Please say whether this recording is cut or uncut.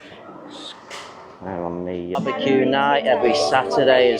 cut